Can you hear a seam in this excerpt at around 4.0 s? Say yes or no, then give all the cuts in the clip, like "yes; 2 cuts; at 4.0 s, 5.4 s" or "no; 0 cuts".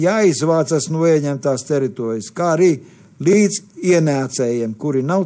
no; 0 cuts